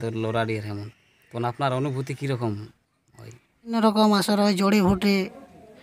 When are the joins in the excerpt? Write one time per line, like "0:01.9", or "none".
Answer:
0:03.7